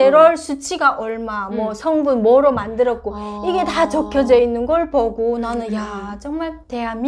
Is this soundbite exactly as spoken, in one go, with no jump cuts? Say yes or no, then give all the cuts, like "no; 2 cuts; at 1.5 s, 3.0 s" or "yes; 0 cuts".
yes; 0 cuts